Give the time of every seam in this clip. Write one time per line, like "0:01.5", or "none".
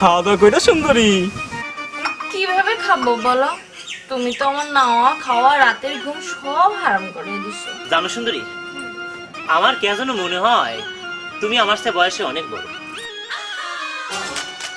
0:07.7